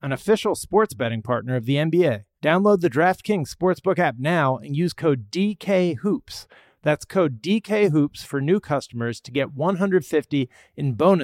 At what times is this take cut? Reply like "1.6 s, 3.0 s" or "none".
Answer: 2.3 s

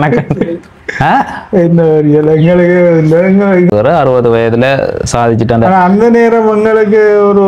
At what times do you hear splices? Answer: 3.7 s

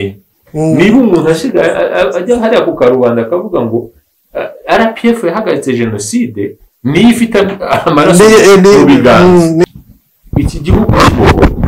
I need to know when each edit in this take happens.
9.6 s

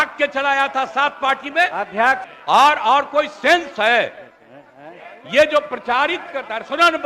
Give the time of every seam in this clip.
2.3 s

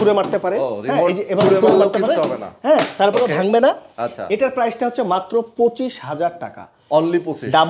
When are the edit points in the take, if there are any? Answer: none

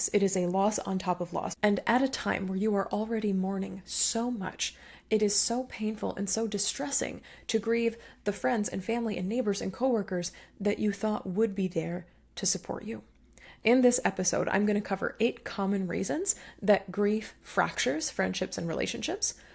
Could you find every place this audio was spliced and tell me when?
1.5 s

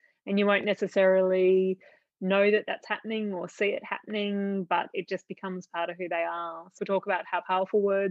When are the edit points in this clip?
6.8 s

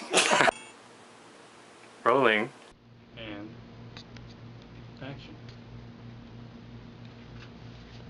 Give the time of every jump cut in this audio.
none

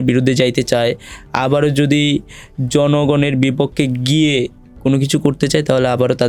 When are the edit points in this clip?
none

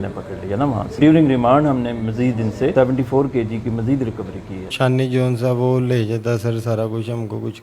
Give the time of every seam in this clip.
1.0 s, 2.7 s, 4.7 s

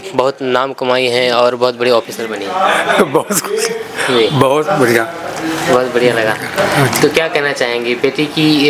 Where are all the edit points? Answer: none

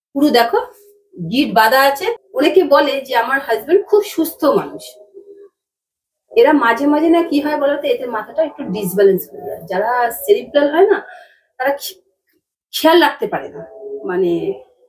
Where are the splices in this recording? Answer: 2.2 s

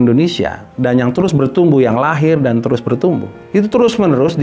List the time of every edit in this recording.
3.3 s

